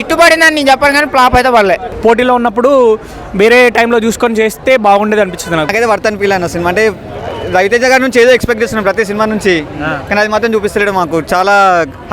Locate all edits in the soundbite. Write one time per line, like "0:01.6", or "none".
0:01.9
0:05.7